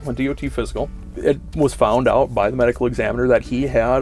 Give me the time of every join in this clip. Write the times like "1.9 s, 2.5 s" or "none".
0.9 s